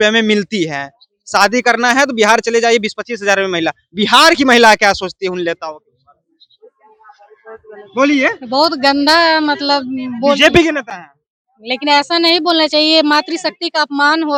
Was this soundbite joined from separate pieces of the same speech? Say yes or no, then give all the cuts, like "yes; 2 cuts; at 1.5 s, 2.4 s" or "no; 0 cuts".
no; 0 cuts